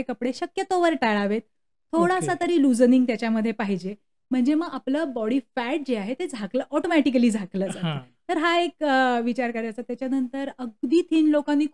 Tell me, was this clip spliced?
no; 0 cuts

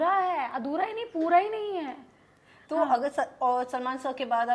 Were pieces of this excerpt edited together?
no; 0 cuts

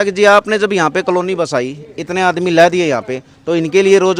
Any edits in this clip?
no; 0 cuts

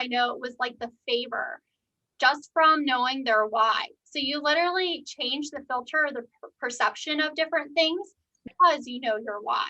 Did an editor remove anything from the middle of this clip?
yes; 1 cut; at 8.4 s

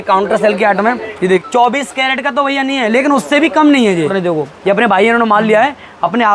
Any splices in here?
yes; 2 cuts; at 1.4 s, 4.1 s

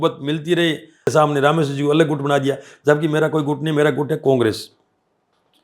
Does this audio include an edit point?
yes; 1 cut; at 1.1 s

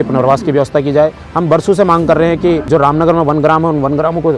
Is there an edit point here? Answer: yes; 2 cuts; at 1.3 s, 2.6 s

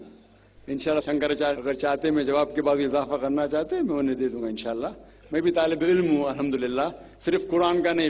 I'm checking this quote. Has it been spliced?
no; 0 cuts

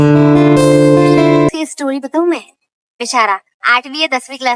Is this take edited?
yes; 1 cut; at 1.5 s

